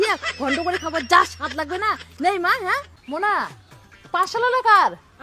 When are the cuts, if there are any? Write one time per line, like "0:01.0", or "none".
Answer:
0:02.9